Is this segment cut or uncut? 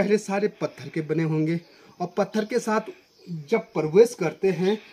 uncut